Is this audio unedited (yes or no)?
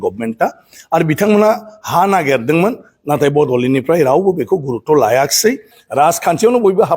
no